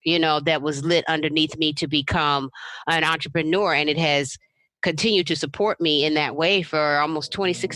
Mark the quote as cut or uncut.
uncut